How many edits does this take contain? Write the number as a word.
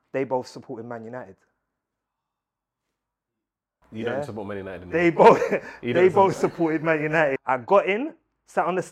one